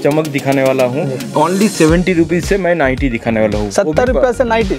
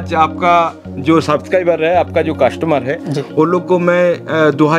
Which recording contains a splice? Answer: first; 1 cut; at 1.2 s

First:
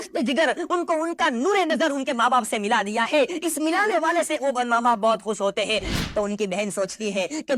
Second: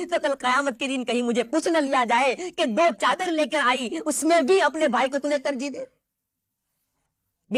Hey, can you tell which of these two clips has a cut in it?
first; 1 cut; at 5.9 s

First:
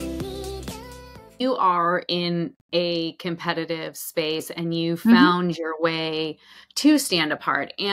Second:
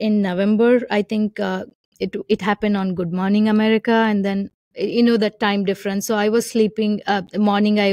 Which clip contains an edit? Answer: first; 1 cut; at 1.4 s

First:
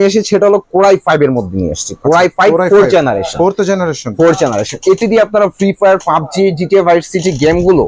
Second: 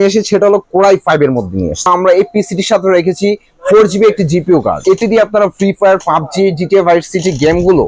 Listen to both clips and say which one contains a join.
second; 2 cuts; at 1.9 s, 4.8 s

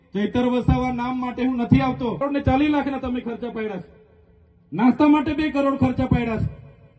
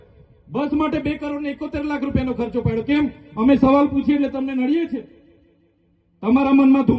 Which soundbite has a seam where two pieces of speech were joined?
first; 1 cut; at 2.2 s

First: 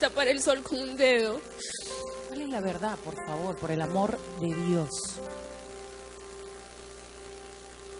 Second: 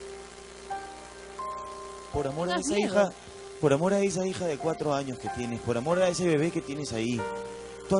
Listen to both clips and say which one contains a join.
first; 1 cut; at 1.4 s

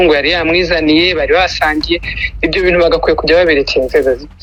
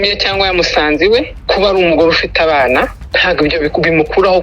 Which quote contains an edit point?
second; 2 cuts; at 1.3 s, 3.0 s

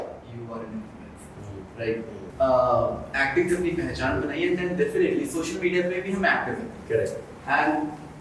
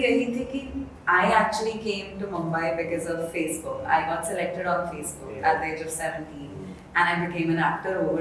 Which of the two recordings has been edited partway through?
first; 1 cut; at 2.2 s

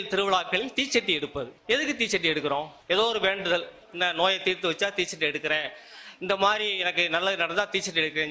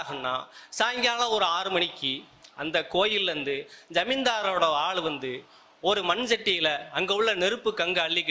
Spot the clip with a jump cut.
first; 2 cuts; at 1.6 s, 2.8 s

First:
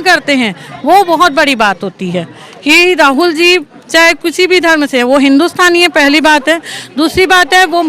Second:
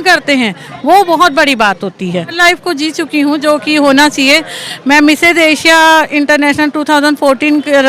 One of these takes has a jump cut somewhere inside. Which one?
second; 1 cut; at 2.4 s

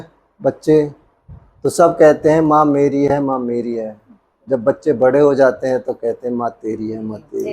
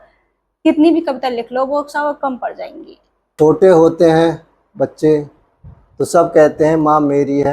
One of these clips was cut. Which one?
second; 1 cut; at 3.3 s

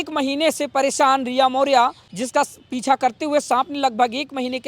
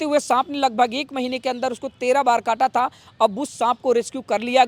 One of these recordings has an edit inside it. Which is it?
first; 1 cut; at 2.1 s

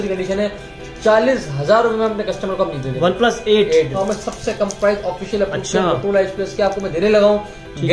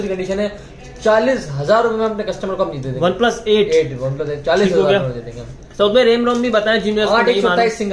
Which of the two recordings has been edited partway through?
first; 1 cut; at 3.9 s

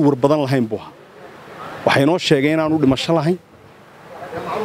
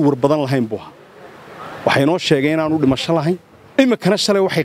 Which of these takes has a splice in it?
second; 1 cut; at 3.6 s

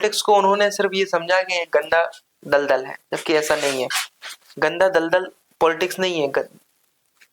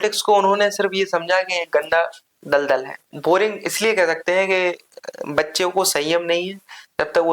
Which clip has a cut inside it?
second; 1 cut; at 3.1 s

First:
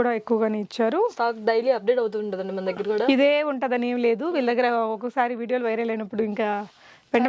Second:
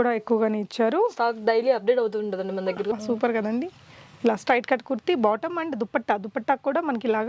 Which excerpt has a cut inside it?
second; 1 cut; at 2.9 s

